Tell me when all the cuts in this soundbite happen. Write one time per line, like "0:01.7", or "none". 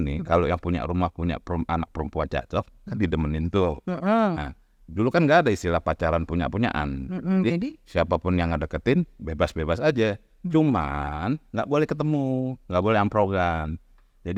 none